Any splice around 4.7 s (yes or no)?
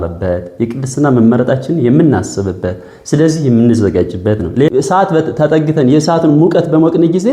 yes